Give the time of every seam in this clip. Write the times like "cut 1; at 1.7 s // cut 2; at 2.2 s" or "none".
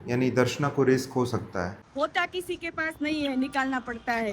cut 1; at 1.8 s